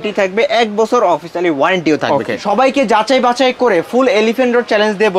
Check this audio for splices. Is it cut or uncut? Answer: cut